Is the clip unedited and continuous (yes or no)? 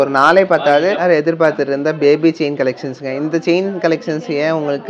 no